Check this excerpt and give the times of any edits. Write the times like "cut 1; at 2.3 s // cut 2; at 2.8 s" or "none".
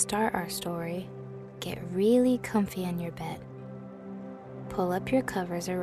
cut 1; at 3.4 s // cut 2; at 4.8 s